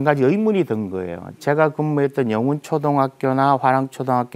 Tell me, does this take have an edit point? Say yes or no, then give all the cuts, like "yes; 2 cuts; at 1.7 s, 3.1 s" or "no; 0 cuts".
no; 0 cuts